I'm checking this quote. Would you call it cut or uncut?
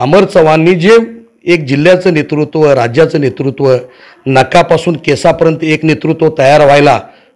uncut